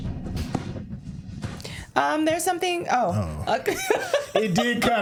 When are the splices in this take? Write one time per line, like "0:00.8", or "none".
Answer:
none